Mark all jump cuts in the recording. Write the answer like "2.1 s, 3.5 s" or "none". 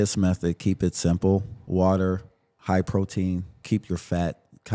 1.6 s, 2.5 s, 3.6 s

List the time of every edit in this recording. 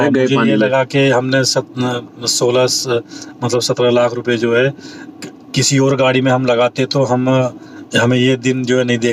none

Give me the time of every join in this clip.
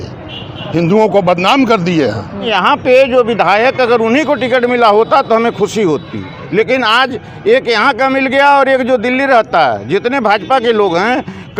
2.4 s

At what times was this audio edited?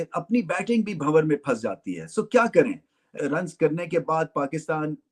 none

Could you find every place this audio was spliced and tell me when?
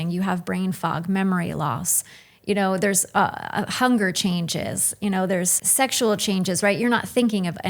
5.6 s

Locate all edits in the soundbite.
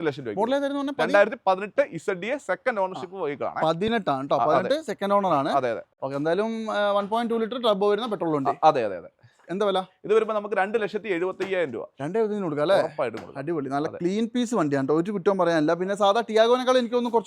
5.9 s

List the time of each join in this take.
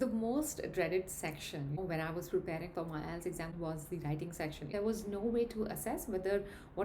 1.8 s, 3.5 s, 4.7 s

